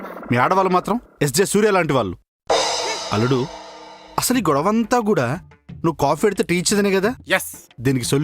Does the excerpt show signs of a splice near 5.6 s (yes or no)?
no